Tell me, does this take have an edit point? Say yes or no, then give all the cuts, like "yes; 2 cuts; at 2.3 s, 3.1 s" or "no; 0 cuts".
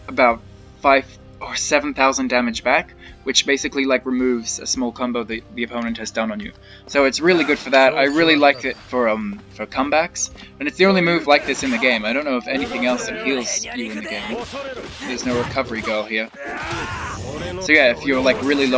no; 0 cuts